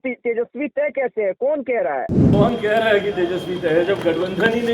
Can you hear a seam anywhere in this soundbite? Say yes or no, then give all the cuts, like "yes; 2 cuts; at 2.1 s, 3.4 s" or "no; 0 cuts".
yes; 1 cut; at 2.3 s